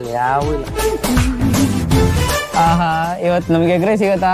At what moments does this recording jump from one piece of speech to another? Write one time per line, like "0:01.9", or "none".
0:02.5